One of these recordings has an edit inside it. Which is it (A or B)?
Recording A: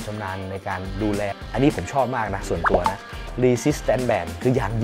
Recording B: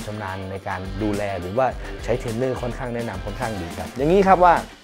A